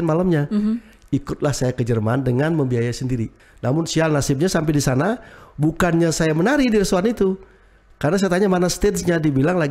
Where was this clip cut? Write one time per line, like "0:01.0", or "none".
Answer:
0:03.4

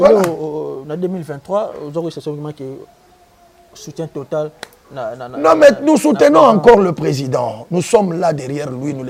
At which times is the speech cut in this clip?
none

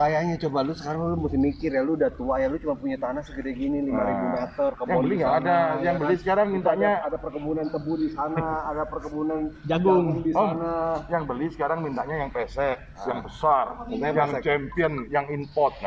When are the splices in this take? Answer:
none

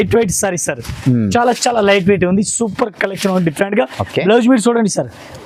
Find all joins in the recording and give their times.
none

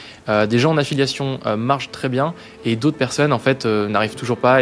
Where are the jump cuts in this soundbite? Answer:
none

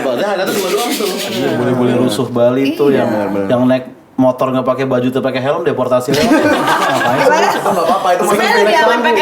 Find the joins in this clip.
0:01.3

